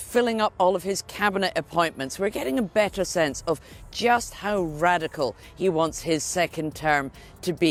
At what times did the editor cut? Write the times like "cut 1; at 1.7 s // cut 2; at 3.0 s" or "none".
none